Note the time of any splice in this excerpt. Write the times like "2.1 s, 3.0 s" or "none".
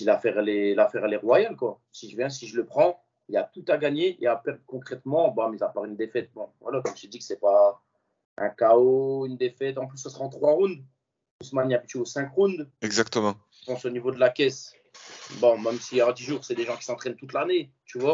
none